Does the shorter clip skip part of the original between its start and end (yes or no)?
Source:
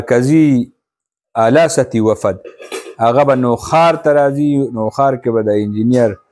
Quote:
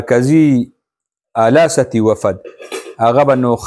no